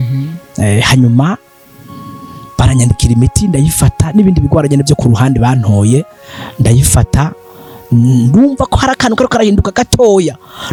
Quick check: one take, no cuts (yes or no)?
yes